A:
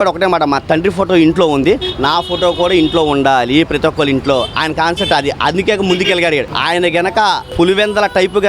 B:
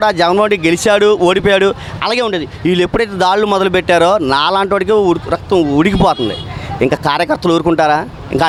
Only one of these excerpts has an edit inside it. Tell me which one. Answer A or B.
A